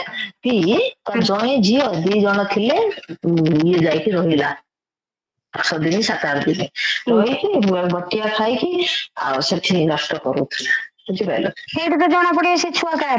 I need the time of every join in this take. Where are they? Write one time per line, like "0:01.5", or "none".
none